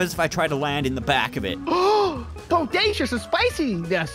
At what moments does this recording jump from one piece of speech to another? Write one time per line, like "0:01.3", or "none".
none